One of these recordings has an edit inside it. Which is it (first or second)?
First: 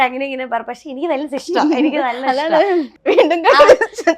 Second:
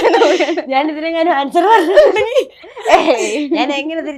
first